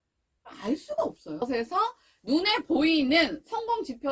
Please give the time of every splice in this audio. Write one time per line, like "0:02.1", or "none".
0:01.4